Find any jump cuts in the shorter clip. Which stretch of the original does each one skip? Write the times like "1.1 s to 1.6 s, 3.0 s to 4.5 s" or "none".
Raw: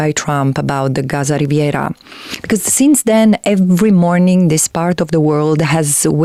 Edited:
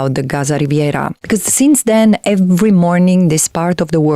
2.0 s to 2.4 s